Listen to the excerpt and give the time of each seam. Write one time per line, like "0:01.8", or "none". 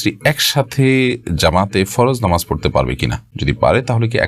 none